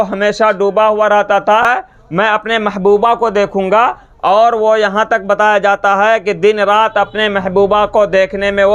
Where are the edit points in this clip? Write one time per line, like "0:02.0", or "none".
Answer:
0:01.7